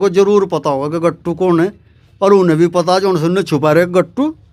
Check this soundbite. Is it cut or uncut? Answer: uncut